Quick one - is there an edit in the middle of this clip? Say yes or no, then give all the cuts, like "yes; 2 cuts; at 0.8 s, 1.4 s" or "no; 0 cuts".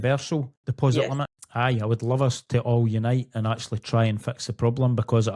yes; 1 cut; at 1.3 s